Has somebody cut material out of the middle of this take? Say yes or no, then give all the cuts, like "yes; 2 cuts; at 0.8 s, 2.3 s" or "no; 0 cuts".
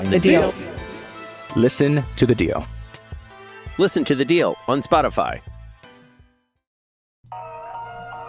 yes; 1 cut; at 7.2 s